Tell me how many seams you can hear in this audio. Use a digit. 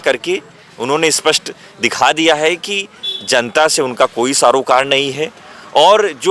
0